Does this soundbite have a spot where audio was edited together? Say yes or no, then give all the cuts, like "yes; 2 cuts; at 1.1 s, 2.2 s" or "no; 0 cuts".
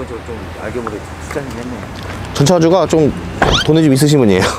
no; 0 cuts